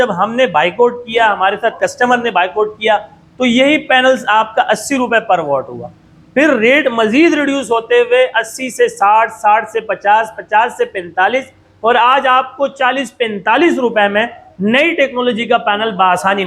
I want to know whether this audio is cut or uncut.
uncut